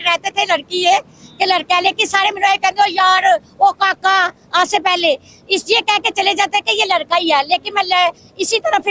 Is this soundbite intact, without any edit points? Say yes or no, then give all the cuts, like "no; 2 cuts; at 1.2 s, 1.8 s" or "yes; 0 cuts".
yes; 0 cuts